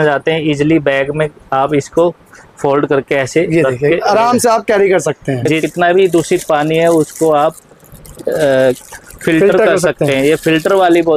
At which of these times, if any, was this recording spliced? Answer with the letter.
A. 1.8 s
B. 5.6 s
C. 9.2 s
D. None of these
B